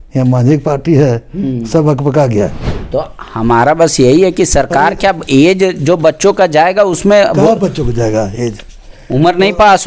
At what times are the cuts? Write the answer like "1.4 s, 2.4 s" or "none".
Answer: 2.7 s